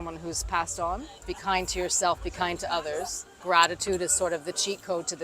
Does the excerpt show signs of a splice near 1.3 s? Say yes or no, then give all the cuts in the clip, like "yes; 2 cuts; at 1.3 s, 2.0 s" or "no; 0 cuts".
yes; 2 cuts; at 1.3 s, 3.4 s